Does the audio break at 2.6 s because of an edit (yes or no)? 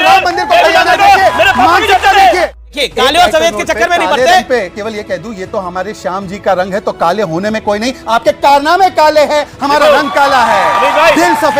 yes